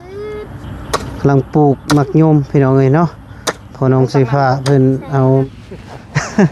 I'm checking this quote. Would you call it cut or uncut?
cut